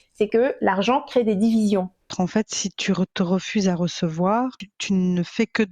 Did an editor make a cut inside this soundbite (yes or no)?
yes